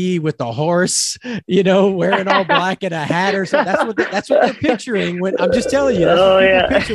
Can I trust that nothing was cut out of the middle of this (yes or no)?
yes